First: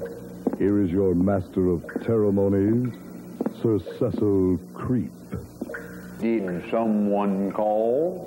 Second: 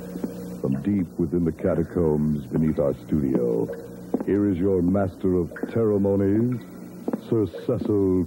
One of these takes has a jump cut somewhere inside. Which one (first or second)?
first